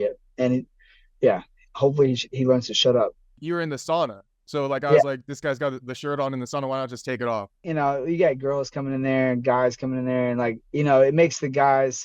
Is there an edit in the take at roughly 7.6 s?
yes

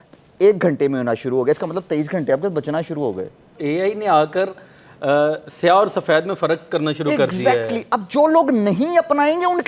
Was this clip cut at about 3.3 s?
no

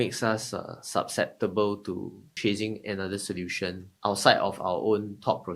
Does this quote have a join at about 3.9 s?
yes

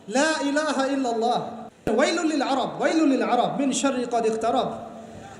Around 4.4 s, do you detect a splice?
no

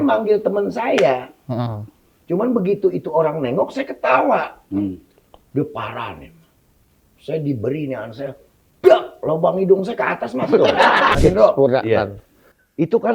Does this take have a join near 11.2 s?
yes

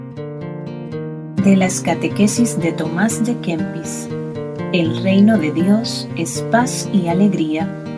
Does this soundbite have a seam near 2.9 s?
no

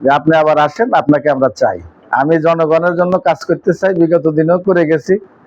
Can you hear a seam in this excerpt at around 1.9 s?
yes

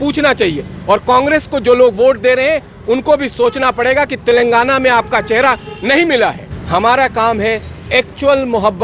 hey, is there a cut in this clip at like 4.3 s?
no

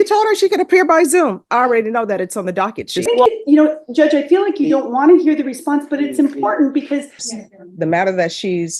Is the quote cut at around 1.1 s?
no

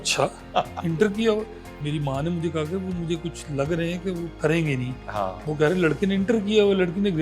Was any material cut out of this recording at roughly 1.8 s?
yes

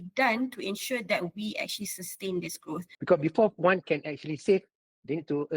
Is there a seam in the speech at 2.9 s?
yes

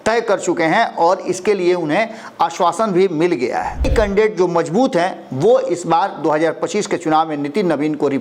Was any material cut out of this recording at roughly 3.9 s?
yes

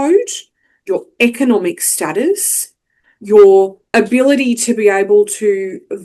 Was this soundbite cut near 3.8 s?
yes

